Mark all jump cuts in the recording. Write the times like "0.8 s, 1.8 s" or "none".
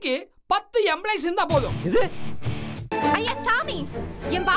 2.9 s